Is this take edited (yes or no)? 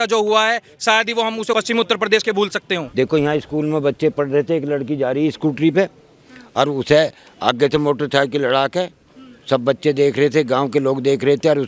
yes